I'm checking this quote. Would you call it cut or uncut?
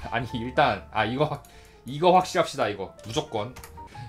cut